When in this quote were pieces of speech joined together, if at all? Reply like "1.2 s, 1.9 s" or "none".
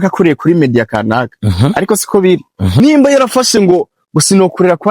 2.8 s